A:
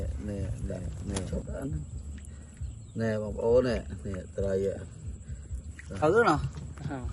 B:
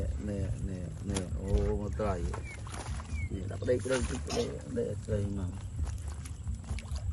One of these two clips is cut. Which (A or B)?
A